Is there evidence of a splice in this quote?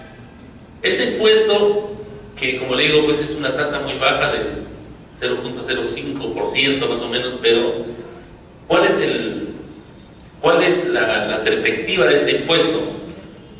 yes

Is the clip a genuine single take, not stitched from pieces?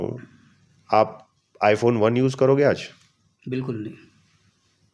yes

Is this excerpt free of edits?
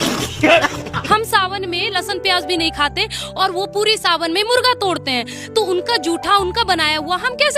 no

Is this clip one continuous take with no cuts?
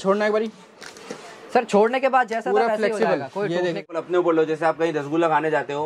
no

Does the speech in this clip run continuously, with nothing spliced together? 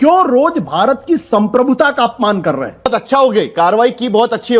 no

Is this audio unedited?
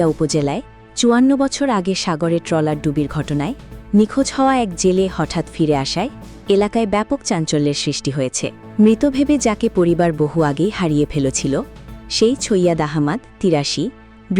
no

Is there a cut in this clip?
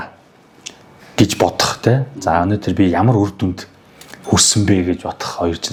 no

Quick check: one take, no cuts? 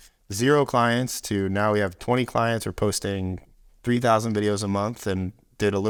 yes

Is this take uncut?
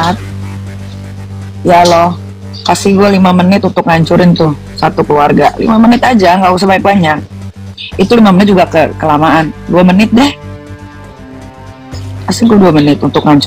yes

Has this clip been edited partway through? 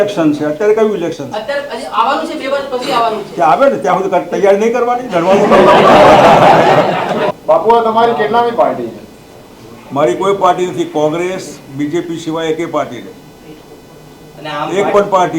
yes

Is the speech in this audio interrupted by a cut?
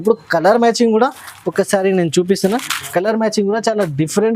no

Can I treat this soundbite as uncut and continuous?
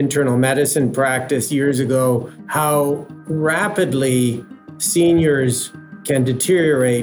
no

